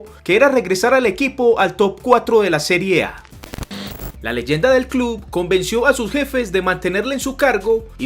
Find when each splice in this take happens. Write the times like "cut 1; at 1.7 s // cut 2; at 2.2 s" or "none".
cut 1; at 3.6 s

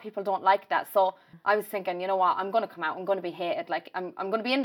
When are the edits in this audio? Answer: cut 1; at 1.3 s

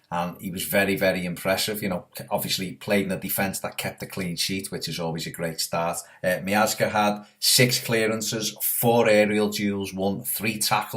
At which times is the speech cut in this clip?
cut 1; at 9.5 s

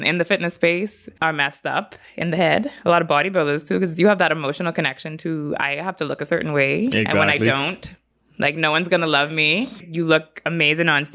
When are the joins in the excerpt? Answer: cut 1; at 1.1 s // cut 2; at 9.8 s

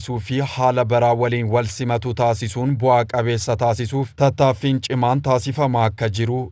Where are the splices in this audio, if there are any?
none

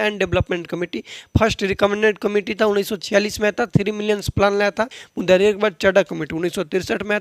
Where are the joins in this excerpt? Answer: cut 1; at 5.0 s

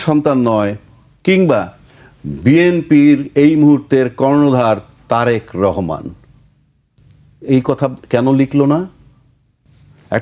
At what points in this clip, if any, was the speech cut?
none

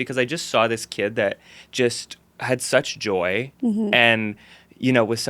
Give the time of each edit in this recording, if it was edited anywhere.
none

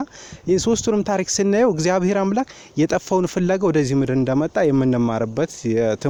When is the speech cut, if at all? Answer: none

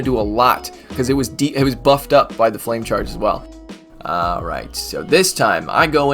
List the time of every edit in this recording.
cut 1; at 3.5 s

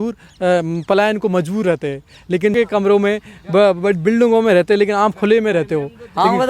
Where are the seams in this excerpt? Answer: cut 1; at 2.5 s

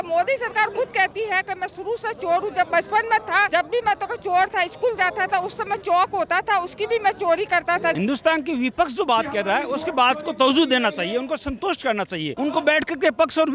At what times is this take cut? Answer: cut 1; at 3.5 s // cut 2; at 5.8 s // cut 3; at 8.0 s // cut 4; at 12.3 s

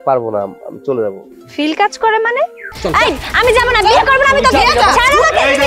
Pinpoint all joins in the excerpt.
cut 1; at 2.7 s

